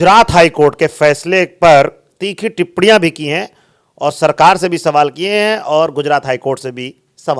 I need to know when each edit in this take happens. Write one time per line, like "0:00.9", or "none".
none